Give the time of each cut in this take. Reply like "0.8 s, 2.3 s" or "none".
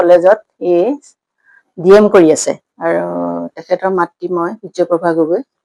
1.0 s